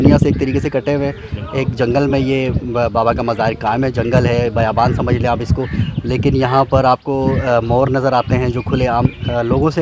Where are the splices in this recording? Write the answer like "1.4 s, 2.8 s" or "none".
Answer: none